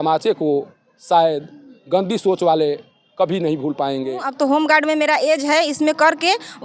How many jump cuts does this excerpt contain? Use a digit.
1